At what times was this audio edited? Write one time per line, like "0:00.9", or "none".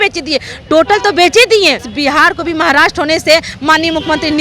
0:01.9